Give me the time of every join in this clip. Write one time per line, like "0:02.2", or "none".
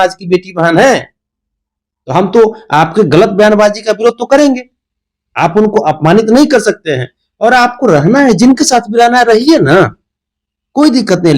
none